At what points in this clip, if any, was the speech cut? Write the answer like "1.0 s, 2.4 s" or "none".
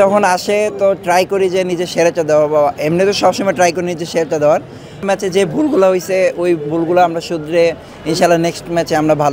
5.0 s